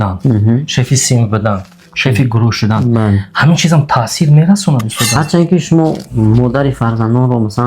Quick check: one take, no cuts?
no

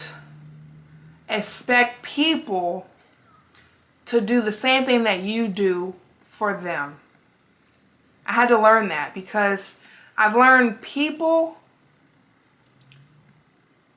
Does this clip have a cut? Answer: no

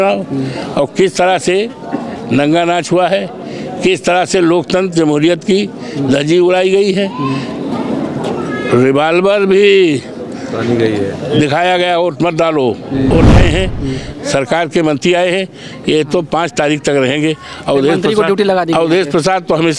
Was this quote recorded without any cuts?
no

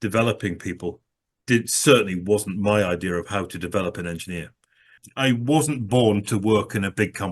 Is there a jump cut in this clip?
yes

